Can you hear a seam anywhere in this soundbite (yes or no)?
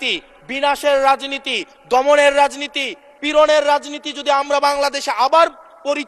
no